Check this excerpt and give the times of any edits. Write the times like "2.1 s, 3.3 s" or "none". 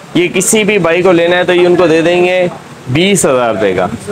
none